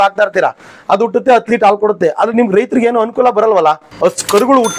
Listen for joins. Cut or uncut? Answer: cut